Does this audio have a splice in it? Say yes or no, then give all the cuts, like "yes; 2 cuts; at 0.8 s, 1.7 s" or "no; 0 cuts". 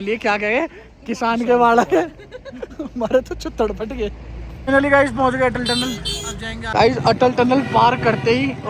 yes; 2 cuts; at 4.6 s, 6.7 s